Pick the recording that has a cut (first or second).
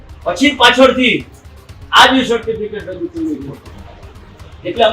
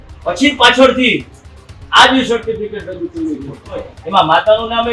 second